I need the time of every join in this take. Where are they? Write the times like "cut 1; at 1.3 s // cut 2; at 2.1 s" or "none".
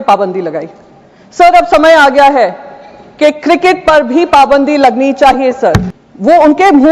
cut 1; at 5.9 s